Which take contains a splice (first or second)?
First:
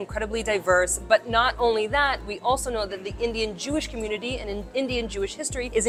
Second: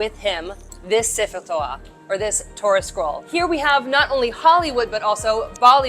second